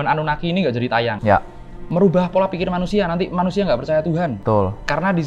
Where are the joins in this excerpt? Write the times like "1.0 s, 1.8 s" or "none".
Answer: 1.2 s, 4.4 s